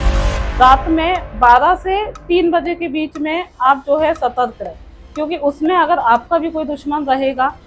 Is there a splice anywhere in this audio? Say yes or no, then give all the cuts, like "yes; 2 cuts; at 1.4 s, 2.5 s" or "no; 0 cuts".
no; 0 cuts